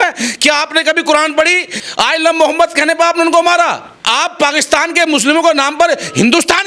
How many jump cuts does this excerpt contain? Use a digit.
2